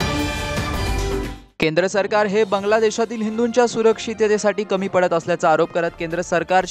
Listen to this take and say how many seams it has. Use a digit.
0